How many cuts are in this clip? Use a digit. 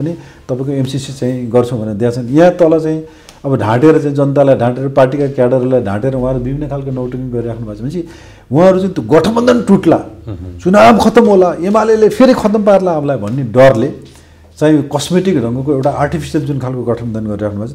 0